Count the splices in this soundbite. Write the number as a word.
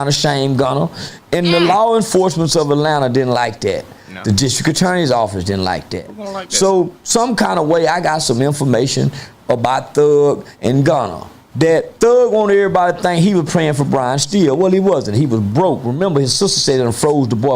one